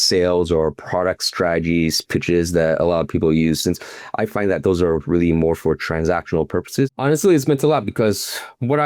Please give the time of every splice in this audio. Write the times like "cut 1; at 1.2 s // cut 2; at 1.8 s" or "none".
cut 1; at 6.9 s